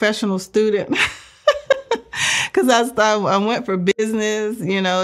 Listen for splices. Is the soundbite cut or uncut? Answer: uncut